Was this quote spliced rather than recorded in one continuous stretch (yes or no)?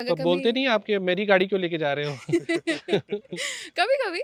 no